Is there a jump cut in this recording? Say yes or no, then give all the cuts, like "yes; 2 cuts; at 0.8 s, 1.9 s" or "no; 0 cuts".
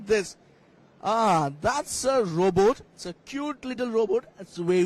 no; 0 cuts